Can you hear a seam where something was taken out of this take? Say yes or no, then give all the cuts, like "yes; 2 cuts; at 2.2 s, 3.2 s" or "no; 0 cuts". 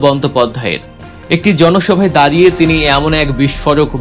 no; 0 cuts